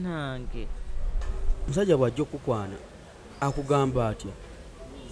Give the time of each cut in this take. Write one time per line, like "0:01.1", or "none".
0:01.7